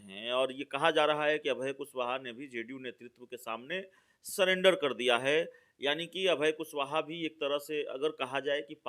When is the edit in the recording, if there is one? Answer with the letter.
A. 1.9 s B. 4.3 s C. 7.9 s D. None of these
D